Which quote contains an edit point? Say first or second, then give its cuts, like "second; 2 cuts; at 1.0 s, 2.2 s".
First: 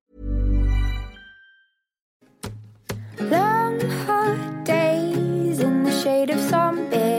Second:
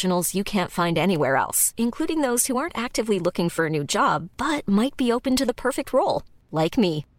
first; 1 cut; at 2.1 s